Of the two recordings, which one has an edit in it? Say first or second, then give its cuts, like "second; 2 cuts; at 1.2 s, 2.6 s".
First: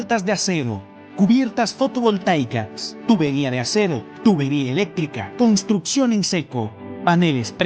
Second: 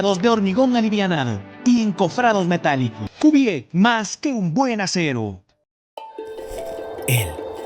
second; 1 cut; at 5.8 s